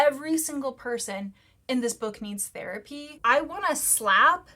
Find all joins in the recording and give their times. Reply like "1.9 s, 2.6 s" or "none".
3.2 s